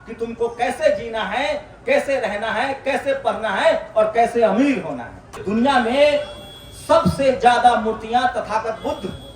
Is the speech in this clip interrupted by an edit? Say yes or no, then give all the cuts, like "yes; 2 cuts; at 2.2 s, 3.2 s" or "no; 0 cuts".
yes; 1 cut; at 5.4 s